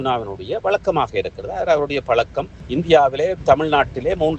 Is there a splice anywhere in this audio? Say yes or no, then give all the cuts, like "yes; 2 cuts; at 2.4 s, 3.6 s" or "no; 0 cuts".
yes; 1 cut; at 2.6 s